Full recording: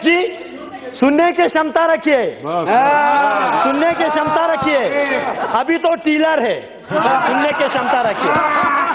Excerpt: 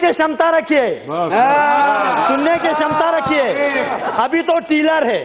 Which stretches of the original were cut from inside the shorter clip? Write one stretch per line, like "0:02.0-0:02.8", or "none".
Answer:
none